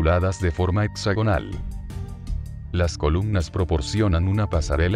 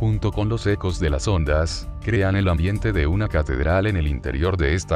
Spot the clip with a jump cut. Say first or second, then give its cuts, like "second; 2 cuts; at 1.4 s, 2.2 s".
second; 1 cut; at 1.7 s